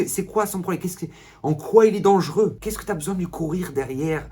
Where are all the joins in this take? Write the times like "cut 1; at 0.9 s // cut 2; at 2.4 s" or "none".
cut 1; at 2.7 s